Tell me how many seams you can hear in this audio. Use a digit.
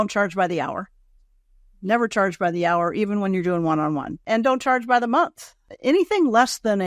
2